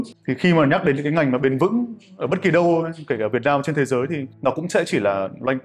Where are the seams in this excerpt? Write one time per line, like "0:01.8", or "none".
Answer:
none